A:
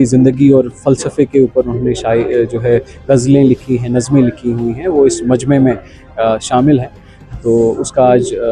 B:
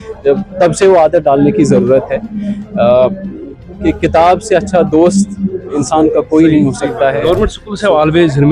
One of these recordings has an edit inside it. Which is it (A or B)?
B